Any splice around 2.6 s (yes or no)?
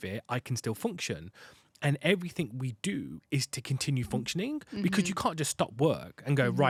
no